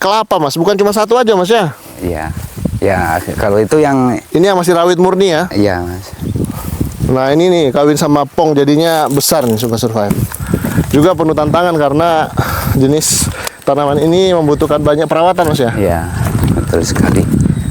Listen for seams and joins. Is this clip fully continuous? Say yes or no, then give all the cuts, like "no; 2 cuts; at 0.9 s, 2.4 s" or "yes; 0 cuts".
no; 1 cut; at 10.1 s